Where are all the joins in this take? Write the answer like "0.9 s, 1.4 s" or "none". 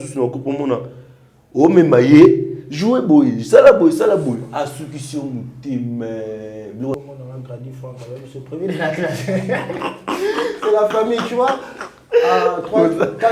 6.9 s